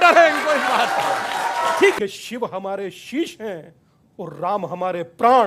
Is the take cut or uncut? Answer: cut